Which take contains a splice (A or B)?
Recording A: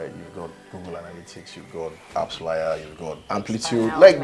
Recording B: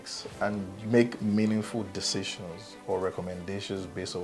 A